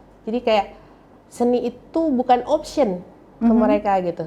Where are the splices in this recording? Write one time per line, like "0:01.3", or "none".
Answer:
none